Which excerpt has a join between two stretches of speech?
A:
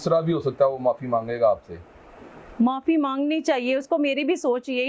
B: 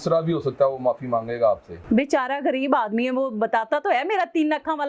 B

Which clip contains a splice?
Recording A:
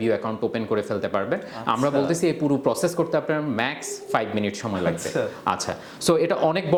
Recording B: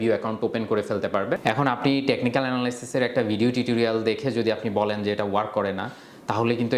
B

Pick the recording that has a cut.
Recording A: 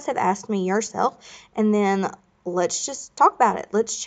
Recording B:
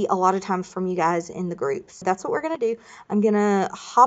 B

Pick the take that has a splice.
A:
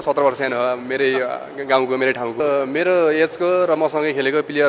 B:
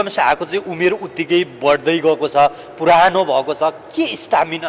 A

